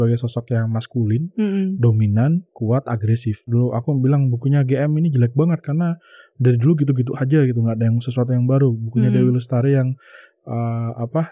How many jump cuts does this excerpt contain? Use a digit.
1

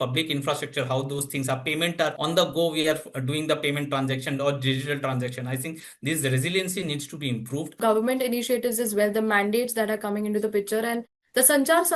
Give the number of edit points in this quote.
2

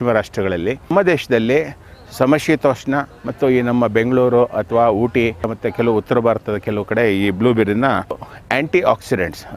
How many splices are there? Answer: 3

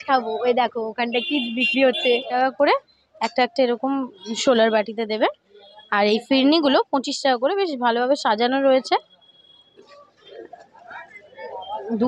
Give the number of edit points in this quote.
2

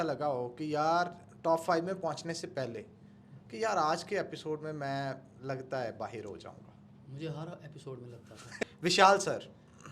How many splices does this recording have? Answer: 1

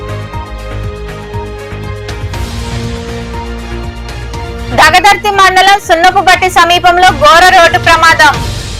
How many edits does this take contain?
1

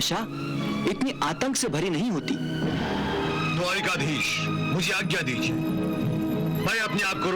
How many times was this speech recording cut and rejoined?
1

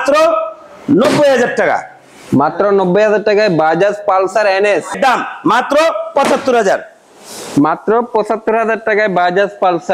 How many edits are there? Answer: 1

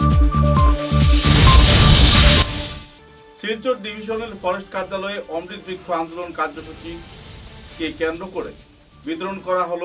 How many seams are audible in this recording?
1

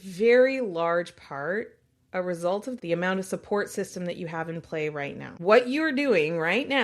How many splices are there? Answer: 2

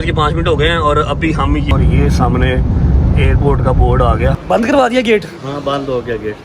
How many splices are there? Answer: 2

